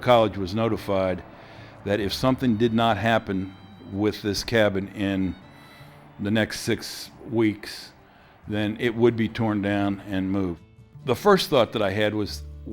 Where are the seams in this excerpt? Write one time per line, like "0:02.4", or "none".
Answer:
0:10.6